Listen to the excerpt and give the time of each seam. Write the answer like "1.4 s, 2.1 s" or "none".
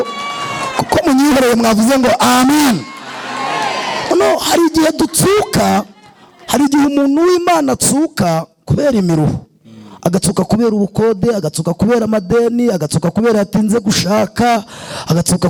none